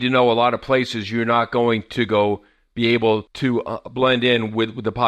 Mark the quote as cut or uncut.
cut